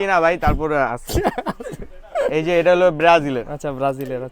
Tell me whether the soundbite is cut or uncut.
uncut